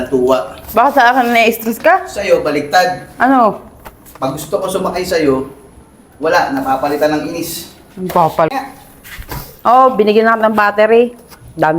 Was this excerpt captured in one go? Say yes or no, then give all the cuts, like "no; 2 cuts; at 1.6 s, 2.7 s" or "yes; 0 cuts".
no; 1 cut; at 8.5 s